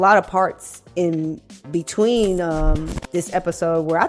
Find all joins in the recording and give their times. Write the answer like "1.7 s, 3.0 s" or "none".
none